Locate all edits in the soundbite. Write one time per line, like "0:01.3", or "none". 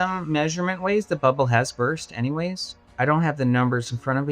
0:02.8